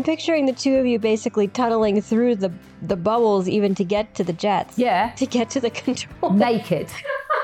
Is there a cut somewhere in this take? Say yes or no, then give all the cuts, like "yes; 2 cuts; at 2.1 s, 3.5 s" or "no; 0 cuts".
no; 0 cuts